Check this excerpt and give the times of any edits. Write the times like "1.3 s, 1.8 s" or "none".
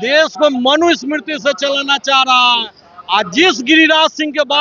none